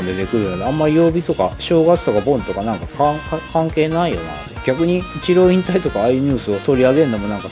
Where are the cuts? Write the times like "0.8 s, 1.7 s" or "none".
5.1 s, 6.5 s